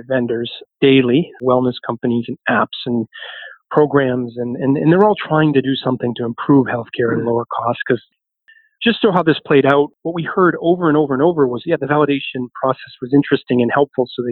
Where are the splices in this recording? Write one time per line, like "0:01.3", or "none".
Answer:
none